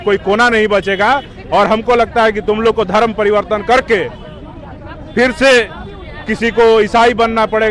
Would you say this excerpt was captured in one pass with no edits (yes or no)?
yes